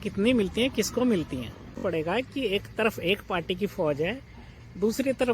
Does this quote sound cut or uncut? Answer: cut